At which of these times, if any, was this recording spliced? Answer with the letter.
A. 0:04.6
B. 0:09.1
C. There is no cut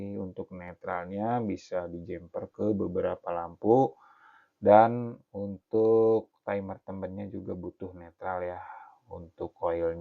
A